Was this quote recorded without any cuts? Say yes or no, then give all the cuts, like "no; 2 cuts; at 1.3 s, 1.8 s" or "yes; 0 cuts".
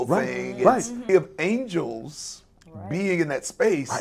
no; 1 cut; at 1.0 s